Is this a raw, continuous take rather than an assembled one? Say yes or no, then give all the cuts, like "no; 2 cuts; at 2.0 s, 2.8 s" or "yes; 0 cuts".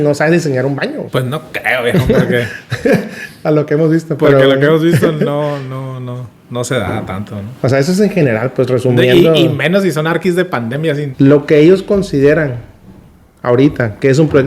no; 2 cuts; at 1.0 s, 10.5 s